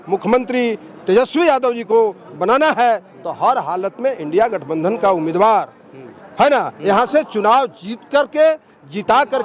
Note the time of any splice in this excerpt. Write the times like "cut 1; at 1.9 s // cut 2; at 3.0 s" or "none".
none